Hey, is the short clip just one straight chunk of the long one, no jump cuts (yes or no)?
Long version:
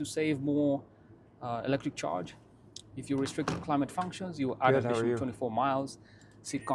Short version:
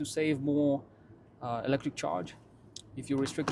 yes